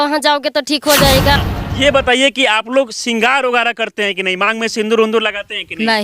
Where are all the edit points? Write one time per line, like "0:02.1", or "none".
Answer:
0:01.4